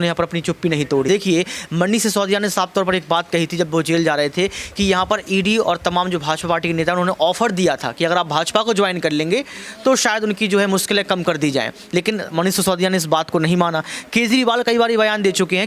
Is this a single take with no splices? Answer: no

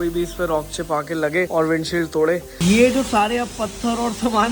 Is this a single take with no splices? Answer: no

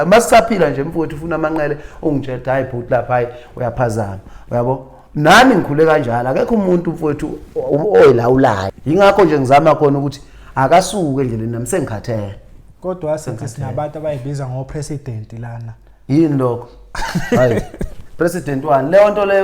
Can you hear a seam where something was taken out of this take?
yes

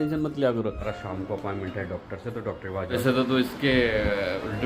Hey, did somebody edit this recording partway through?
yes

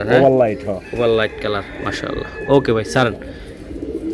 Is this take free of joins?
yes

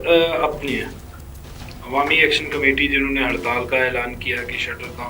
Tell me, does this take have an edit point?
no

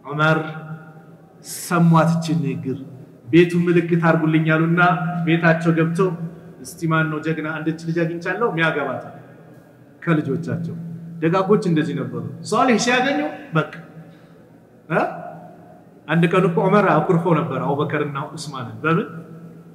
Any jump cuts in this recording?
no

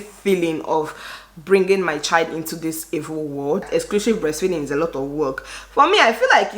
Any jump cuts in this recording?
yes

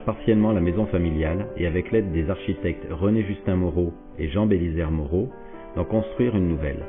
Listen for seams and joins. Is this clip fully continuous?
no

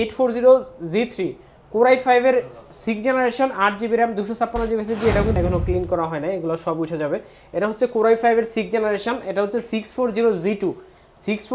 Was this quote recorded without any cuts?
no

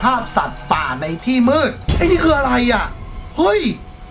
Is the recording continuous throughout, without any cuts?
no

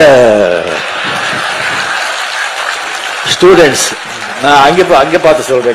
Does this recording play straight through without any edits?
yes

